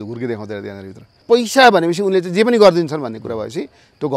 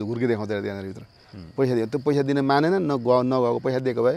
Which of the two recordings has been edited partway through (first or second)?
first